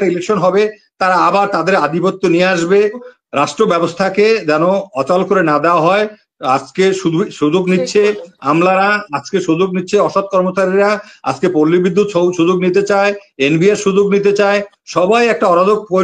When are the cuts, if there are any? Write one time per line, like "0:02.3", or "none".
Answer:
0:03.1